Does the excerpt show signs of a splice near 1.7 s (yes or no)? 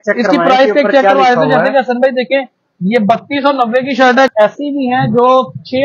no